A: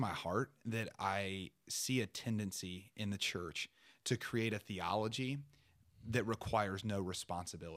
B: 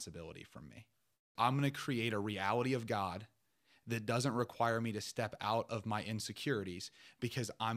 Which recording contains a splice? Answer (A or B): B